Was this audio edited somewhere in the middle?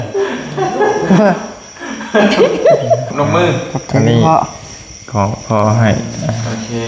yes; 1 cut; at 3.1 s

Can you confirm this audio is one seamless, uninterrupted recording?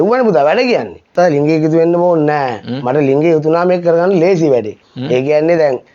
no; 1 cut; at 1.1 s

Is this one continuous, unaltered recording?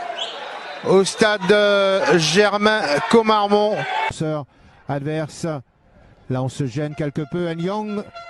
no; 1 cut; at 4.1 s

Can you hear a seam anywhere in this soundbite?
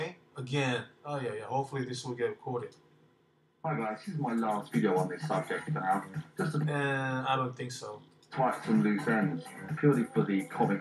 yes; 1 cut; at 1.4 s

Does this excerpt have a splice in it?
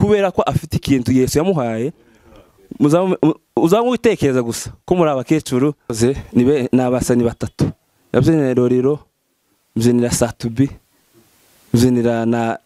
yes; 1 cut; at 6.0 s

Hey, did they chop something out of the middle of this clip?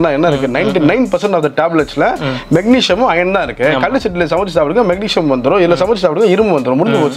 no; 0 cuts

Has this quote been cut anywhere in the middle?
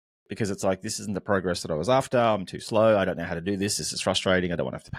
no; 0 cuts

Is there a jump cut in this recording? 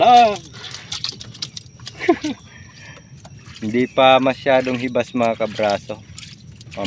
no; 0 cuts

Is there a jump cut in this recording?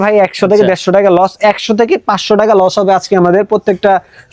no; 0 cuts

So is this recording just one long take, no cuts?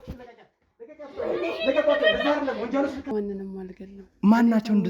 no; 1 cut; at 3.1 s

